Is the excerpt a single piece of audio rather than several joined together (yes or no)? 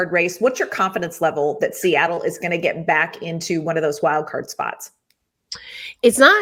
yes